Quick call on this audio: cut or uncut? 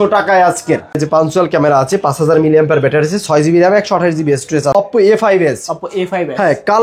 cut